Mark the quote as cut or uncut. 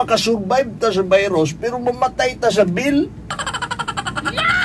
uncut